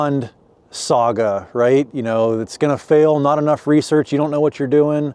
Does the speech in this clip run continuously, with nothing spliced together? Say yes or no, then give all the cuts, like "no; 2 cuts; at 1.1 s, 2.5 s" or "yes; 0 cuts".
yes; 0 cuts